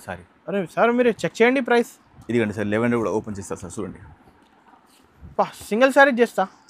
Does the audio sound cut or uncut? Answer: uncut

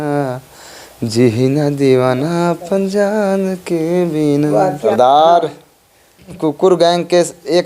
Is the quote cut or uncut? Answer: cut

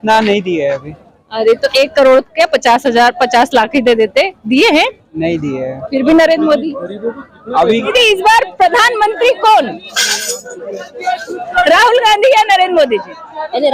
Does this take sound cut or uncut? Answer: cut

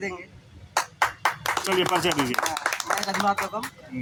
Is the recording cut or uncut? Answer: uncut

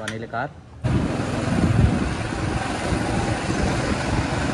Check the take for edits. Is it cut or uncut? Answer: uncut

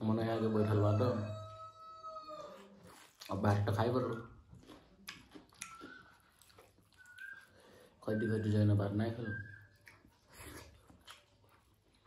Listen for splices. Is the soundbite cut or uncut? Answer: uncut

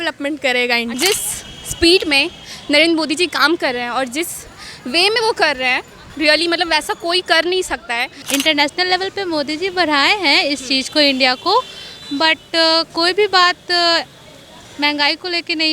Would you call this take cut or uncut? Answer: cut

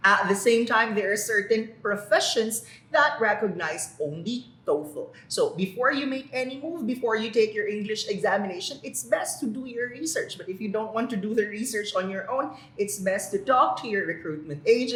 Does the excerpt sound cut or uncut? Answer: uncut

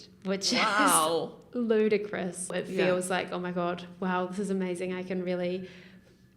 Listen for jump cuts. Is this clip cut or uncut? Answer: cut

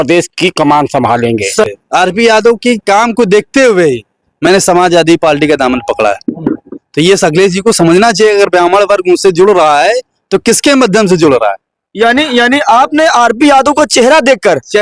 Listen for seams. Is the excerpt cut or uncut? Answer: cut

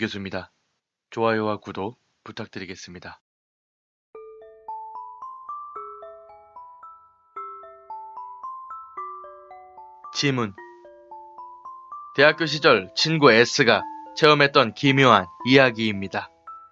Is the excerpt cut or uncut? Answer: cut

